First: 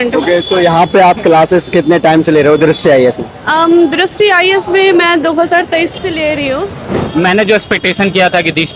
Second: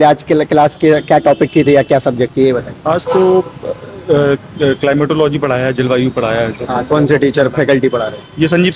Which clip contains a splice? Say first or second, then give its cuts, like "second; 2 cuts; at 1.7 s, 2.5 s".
first; 1 cut; at 6.9 s